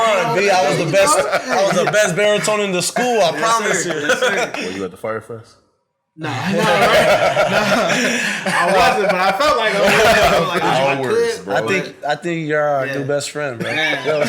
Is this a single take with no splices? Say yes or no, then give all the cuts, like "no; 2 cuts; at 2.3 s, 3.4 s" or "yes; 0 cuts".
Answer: no; 2 cuts; at 4.6 s, 10.5 s